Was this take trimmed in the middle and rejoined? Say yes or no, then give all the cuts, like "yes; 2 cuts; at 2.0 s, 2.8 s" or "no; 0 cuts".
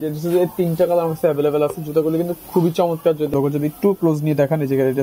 yes; 1 cut; at 3.3 s